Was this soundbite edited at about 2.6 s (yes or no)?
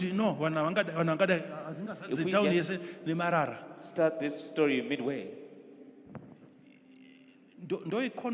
yes